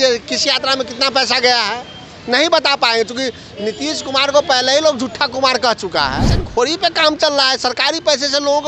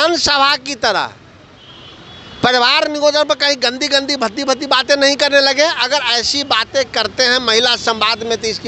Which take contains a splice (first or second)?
first